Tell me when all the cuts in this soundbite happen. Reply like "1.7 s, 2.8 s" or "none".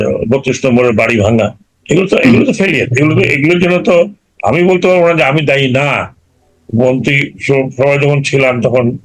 1.7 s

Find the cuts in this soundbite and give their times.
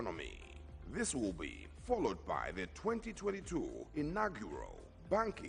2.3 s

